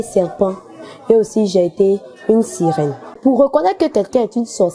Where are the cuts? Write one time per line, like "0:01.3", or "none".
0:03.2

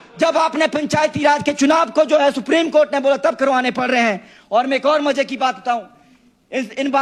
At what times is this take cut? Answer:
none

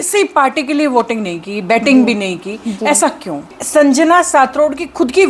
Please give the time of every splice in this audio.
0:03.6

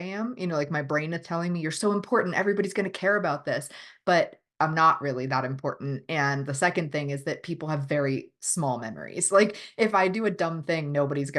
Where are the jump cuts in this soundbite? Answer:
none

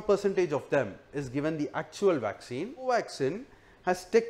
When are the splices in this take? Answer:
0:02.8

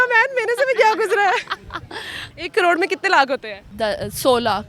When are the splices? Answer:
0:02.3
0:03.6

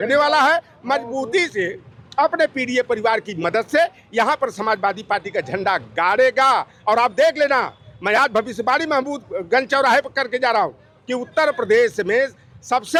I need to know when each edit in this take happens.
none

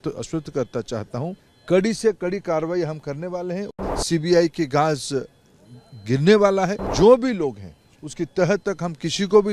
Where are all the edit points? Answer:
0:01.5
0:03.7
0:06.8

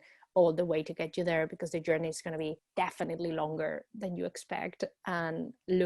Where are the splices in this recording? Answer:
0:02.6

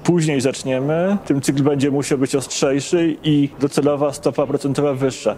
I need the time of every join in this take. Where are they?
0:01.2
0:03.5

